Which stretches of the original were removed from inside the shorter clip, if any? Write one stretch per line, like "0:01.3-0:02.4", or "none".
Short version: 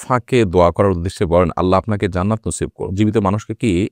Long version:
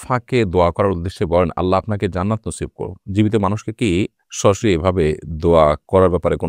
0:02.8-0:03.0